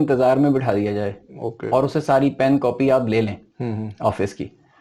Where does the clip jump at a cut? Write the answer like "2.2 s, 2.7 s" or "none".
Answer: none